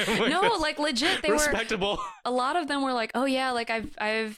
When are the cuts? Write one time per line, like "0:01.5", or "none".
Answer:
0:02.2